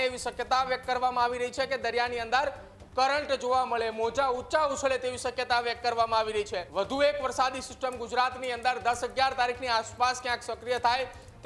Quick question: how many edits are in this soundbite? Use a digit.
1